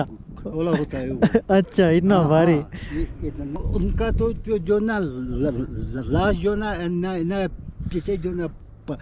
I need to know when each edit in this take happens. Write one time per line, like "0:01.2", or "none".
0:03.6